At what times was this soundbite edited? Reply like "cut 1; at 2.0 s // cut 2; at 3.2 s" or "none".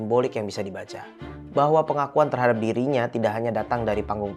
none